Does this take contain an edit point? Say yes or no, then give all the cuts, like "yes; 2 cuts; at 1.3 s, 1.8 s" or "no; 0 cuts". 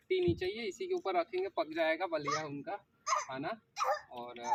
no; 0 cuts